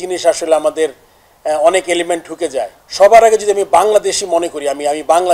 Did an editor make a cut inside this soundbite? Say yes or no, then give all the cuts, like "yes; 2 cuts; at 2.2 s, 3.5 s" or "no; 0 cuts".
yes; 1 cut; at 2.8 s